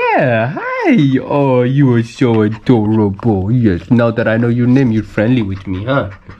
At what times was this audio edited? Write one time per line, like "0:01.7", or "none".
none

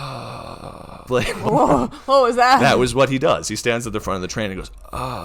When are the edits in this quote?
0:01.0

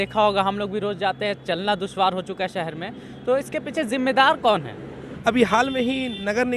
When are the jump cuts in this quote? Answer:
0:05.1

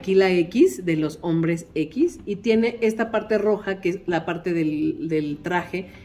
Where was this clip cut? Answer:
none

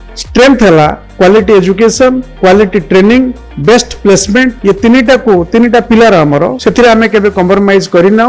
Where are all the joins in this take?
0:01.0
0:02.3
0:03.5
0:04.6
0:06.6

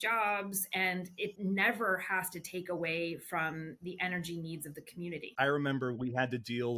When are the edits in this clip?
0:01.4
0:05.3

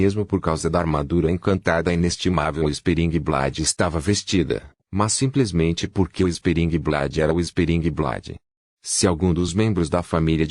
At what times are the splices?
0:05.9

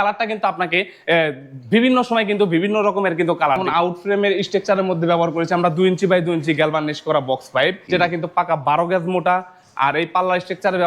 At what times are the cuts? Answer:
0:03.6
0:07.9

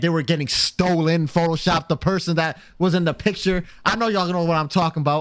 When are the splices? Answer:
none

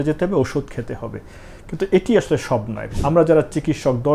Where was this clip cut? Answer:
0:02.8

